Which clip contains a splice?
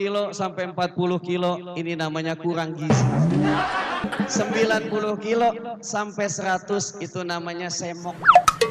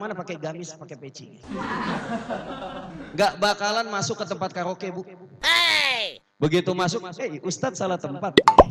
first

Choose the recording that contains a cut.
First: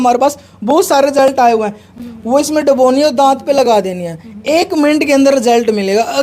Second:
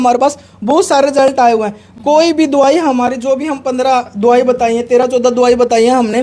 first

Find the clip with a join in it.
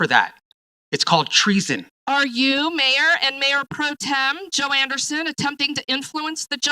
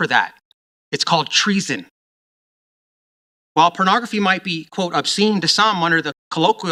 first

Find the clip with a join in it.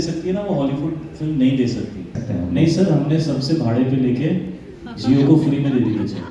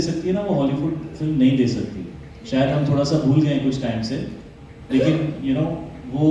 first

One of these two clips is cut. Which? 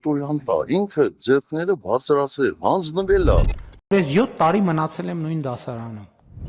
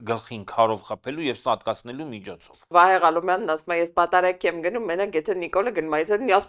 second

